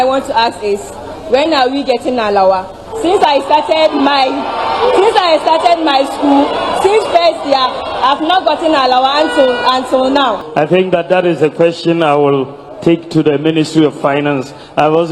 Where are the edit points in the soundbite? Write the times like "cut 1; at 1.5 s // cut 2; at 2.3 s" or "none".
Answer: cut 1; at 10.4 s